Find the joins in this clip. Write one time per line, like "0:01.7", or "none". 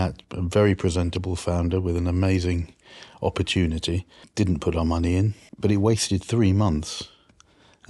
0:04.2
0:05.4

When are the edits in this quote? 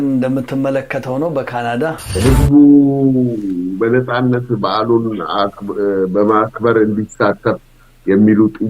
0:02.1

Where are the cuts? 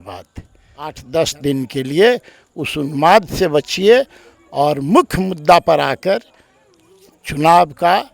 0:01.0

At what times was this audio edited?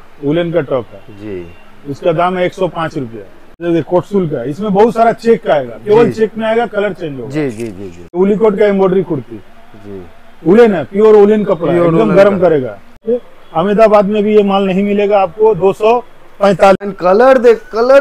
0:03.6
0:08.2
0:13.0
0:16.8

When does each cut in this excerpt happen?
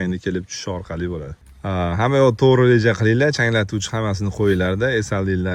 0:01.3

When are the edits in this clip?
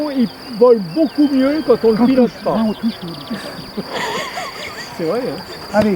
none

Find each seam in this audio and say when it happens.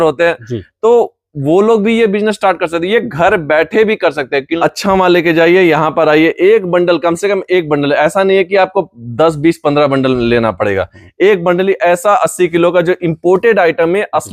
0:04.5

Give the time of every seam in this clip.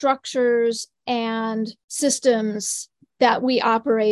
0:01.8

